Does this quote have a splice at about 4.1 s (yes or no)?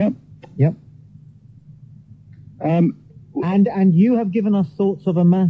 no